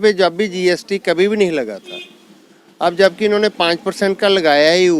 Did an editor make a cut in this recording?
no; 0 cuts

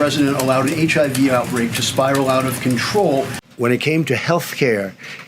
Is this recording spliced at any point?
yes; 1 cut; at 3.4 s

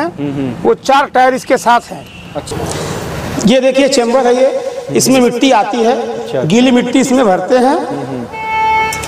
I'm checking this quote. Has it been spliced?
yes; 1 cut; at 2.4 s

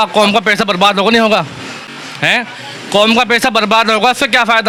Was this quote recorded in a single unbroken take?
yes; 0 cuts

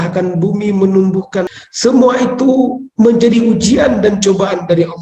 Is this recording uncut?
no; 1 cut; at 1.5 s

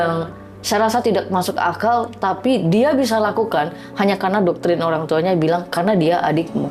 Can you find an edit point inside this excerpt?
no; 0 cuts

